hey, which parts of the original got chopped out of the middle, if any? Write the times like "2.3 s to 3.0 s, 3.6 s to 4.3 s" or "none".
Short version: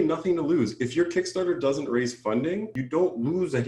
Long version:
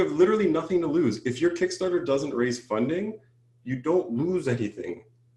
3.2 s to 3.7 s

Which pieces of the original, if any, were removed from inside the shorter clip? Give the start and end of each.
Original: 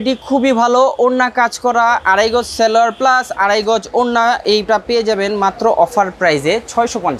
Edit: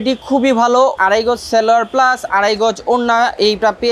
0.9 s to 2.0 s

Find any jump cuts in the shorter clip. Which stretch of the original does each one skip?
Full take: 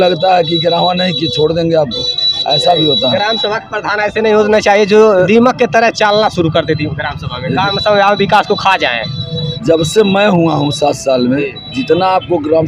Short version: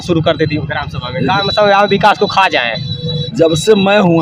none

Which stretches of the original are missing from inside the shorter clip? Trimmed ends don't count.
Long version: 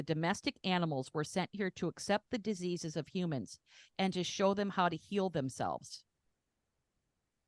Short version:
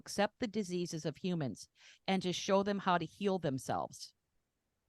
none

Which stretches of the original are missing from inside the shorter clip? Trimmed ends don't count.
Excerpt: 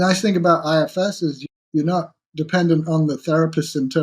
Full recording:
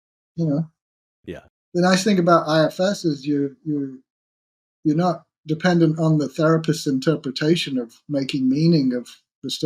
3.2 s to 4.5 s

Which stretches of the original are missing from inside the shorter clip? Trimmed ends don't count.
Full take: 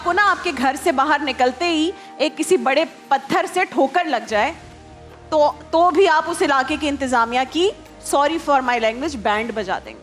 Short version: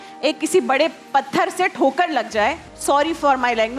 4.7 s to 7.9 s

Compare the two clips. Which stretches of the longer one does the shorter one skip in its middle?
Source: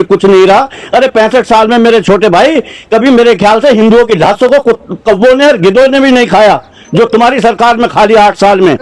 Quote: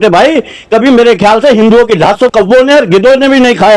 4.5 s to 5.0 s

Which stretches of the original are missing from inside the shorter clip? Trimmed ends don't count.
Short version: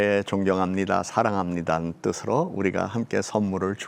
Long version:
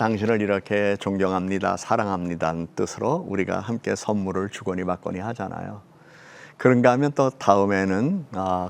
none

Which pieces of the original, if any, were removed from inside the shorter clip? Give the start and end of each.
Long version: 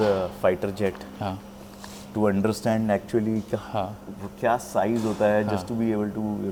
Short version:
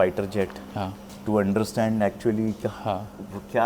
1.5 s to 1.9 s

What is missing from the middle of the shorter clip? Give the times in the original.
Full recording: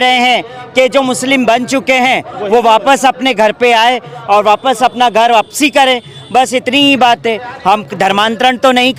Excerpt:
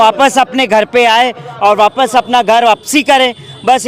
none

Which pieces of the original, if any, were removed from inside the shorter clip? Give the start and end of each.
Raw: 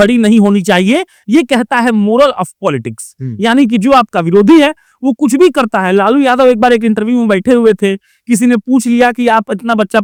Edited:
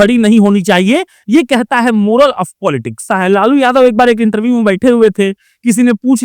3.1 s to 5.7 s

